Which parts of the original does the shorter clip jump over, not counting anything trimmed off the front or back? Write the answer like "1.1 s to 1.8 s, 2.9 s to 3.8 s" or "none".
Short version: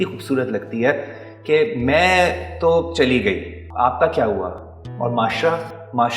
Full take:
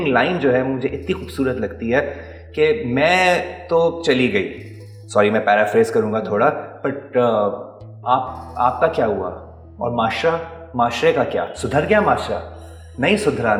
4.7 s to 8.4 s